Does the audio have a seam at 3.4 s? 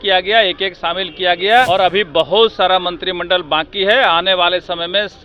no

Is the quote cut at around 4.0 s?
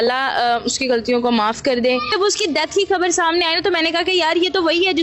no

